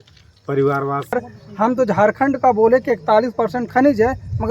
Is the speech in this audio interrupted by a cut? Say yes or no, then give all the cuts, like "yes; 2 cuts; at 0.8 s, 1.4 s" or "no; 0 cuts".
yes; 1 cut; at 1.1 s